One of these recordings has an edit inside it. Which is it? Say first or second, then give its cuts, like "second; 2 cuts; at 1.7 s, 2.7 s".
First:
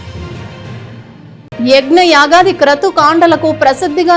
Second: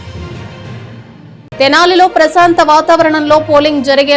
first; 1 cut; at 1.1 s